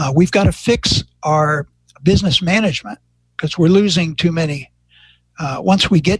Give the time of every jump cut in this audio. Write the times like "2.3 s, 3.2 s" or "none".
none